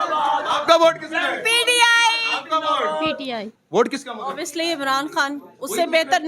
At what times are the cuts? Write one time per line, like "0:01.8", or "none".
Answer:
0:03.6